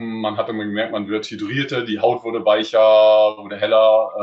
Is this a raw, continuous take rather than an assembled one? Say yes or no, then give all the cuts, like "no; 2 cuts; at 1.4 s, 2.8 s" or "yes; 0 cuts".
yes; 0 cuts